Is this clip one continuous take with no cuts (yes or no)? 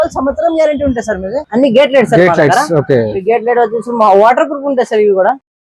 no